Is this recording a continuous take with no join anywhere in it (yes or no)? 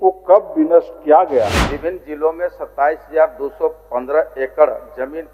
no